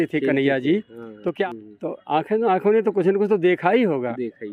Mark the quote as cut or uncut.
cut